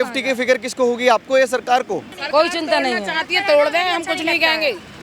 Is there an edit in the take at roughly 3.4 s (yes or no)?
no